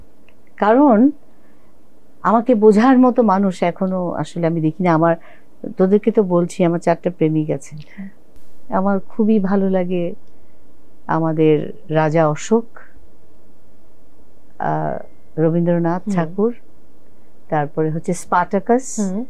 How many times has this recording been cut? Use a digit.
0